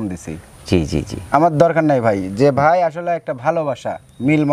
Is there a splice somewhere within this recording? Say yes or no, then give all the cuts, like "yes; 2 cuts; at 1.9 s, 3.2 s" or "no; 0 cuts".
no; 0 cuts